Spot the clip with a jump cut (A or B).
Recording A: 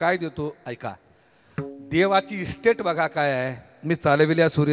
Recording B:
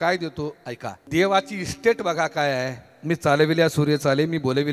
B